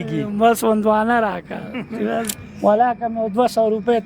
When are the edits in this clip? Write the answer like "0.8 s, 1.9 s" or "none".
2.3 s